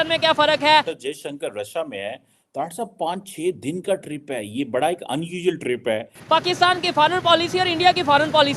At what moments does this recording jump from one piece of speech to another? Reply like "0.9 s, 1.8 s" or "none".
0.9 s, 6.2 s